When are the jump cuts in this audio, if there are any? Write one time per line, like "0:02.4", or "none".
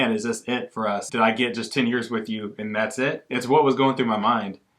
0:01.1
0:03.2